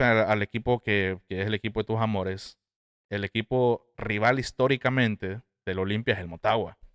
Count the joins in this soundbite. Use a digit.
0